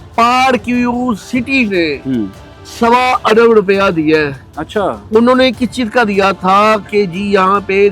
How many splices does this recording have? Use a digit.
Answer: 0